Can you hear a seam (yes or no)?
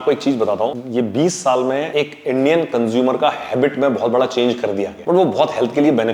yes